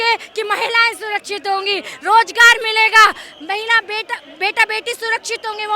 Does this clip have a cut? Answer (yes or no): no